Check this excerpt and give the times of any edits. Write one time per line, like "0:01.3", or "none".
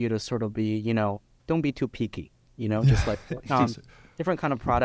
0:01.4